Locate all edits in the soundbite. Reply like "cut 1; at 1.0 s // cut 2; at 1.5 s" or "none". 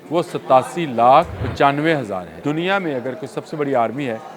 cut 1; at 1.4 s // cut 2; at 2.3 s